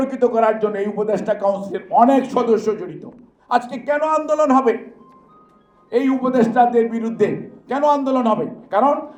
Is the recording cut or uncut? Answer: uncut